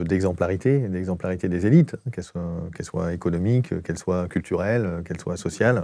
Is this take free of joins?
yes; 0 cuts

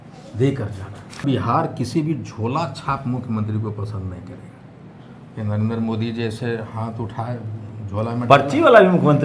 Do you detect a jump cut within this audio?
yes; 1 cut; at 1.2 s

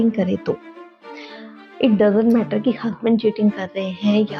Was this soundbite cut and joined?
no; 0 cuts

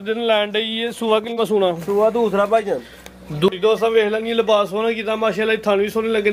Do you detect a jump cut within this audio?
yes; 1 cut; at 3.5 s

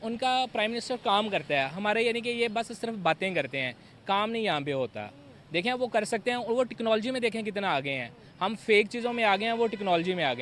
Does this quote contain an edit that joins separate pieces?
no; 0 cuts

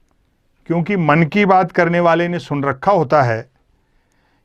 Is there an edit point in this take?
no; 0 cuts

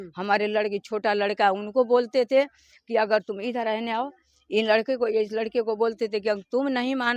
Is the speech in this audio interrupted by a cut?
no; 0 cuts

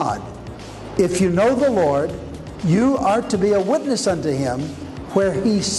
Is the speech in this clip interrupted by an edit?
no; 0 cuts

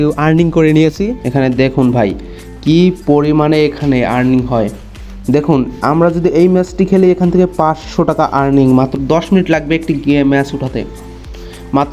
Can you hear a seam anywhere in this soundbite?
yes; 1 cut; at 1.1 s

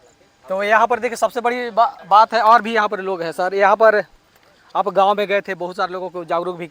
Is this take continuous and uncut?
yes; 0 cuts

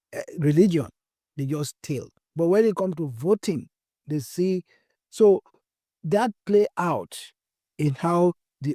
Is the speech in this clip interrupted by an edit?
no; 0 cuts

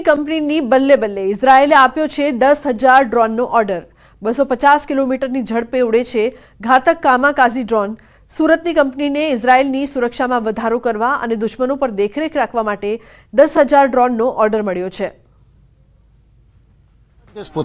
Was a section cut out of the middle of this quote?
yes; 1 cut; at 2.3 s

